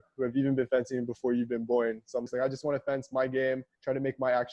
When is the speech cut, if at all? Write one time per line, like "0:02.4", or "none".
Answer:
0:02.3